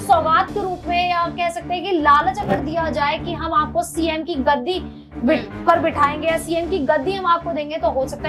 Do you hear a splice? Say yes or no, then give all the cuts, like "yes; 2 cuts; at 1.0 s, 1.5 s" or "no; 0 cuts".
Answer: no; 0 cuts